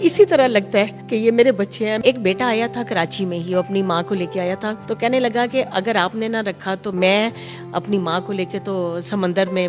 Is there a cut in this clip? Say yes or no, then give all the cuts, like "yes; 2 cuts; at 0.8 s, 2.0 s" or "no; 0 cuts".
yes; 4 cuts; at 1.0 s, 2.0 s, 4.8 s, 6.9 s